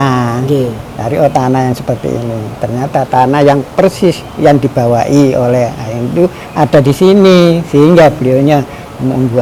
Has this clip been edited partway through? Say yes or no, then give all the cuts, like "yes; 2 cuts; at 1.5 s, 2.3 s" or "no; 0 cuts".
no; 0 cuts